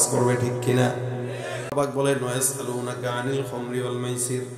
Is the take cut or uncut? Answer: cut